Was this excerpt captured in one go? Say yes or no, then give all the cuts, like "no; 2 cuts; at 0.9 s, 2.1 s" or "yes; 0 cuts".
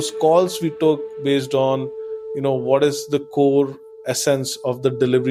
yes; 0 cuts